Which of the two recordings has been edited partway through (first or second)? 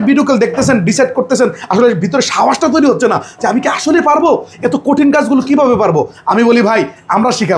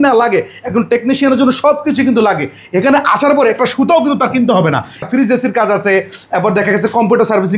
second